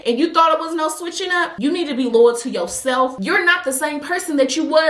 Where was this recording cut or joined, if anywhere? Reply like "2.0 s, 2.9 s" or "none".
1.5 s, 3.1 s